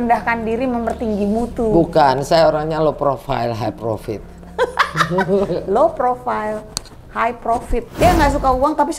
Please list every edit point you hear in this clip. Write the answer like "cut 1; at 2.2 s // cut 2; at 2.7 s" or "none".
cut 1; at 7.9 s